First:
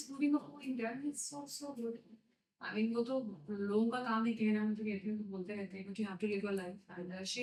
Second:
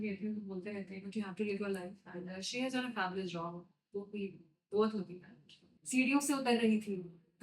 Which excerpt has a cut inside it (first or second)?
second